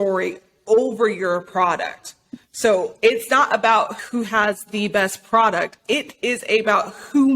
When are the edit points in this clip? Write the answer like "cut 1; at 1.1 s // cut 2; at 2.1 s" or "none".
cut 1; at 4.0 s // cut 2; at 5.9 s